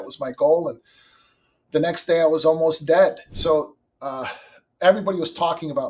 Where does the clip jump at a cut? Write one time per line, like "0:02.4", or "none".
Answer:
0:03.3